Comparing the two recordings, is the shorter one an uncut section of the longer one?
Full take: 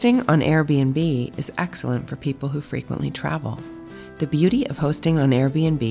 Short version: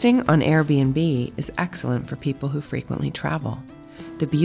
yes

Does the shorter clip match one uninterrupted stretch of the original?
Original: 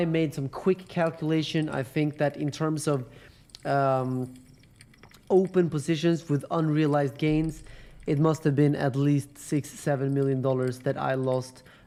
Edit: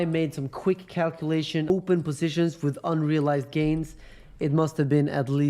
no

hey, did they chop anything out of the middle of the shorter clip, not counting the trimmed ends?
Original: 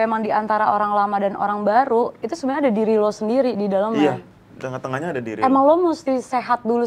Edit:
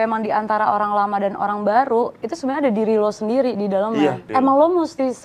yes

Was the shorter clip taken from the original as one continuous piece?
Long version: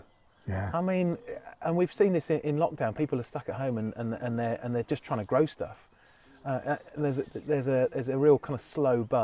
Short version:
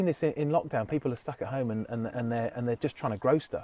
yes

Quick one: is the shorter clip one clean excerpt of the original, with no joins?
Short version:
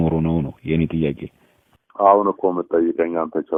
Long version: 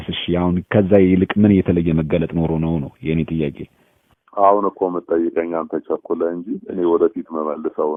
yes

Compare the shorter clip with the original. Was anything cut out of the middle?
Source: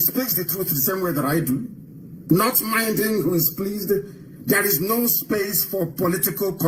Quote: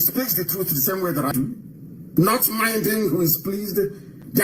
yes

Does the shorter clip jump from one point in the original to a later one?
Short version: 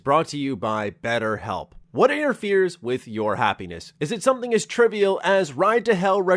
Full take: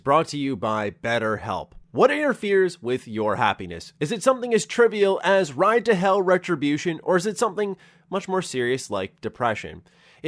no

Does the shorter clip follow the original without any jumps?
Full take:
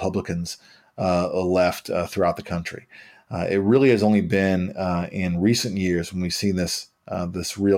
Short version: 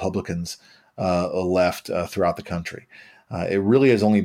yes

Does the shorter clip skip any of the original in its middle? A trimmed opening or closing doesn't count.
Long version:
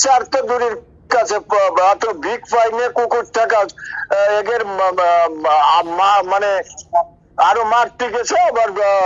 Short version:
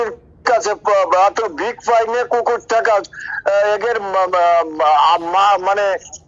no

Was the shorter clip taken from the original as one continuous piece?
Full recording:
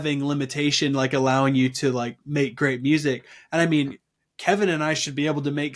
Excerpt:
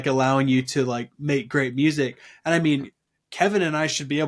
yes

